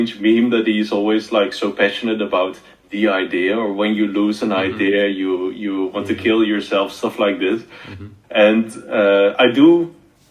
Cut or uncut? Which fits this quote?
uncut